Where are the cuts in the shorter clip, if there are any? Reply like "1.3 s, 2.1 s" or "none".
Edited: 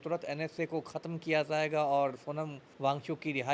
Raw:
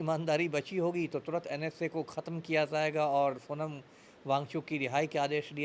2.6 s